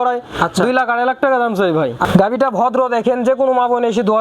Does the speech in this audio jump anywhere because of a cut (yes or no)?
yes